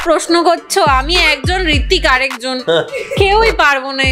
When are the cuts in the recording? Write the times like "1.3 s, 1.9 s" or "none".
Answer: none